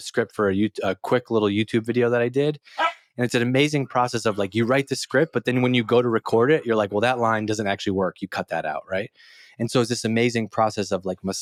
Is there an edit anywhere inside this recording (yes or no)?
no